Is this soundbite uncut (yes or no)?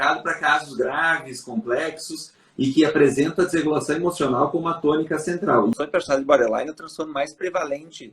no